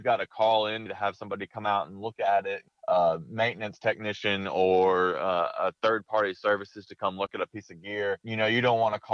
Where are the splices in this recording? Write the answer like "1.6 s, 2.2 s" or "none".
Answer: 0.9 s